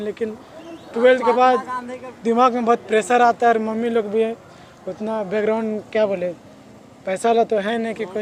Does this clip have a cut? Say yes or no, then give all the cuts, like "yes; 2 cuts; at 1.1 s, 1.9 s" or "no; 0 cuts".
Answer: no; 0 cuts